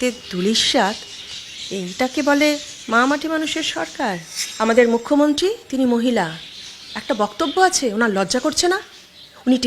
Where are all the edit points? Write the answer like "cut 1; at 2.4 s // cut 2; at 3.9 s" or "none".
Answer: none